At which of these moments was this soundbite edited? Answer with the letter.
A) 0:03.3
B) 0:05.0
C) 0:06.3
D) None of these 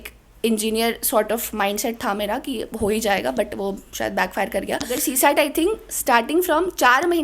B